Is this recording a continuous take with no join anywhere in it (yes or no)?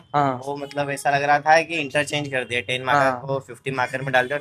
yes